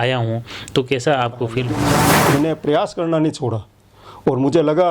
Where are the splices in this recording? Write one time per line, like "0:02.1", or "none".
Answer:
0:02.1